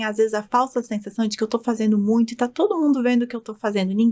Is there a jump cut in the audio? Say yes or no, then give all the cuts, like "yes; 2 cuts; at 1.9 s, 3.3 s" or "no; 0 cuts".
no; 0 cuts